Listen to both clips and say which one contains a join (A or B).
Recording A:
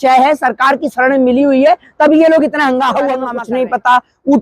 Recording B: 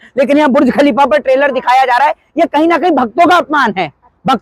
A